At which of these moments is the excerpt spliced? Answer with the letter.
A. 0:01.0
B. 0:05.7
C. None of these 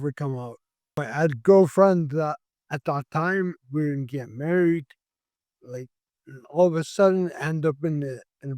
A